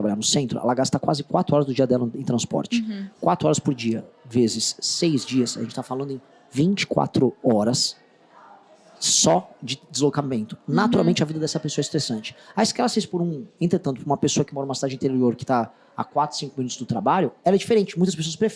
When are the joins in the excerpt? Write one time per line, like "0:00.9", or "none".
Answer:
none